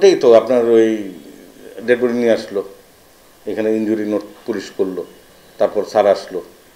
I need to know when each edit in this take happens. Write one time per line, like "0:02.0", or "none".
none